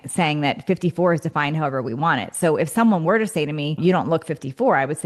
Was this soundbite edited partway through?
yes; 1 cut; at 3.7 s

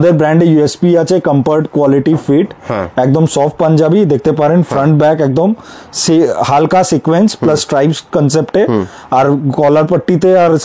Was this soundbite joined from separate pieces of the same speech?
no; 0 cuts

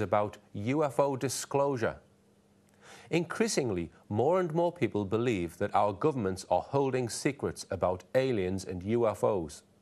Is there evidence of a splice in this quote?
yes; 1 cut; at 4.0 s

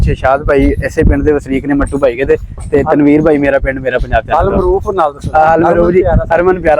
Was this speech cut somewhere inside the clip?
no; 0 cuts

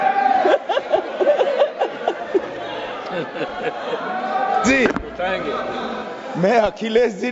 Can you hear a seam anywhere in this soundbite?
no; 0 cuts

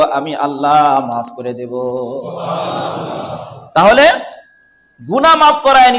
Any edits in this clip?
no; 0 cuts

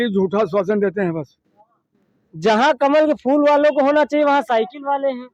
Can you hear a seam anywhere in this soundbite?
no; 0 cuts

